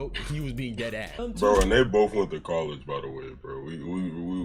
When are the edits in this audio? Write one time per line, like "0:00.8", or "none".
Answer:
0:01.2